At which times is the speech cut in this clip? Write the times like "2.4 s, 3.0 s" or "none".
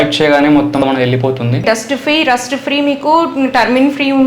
1.6 s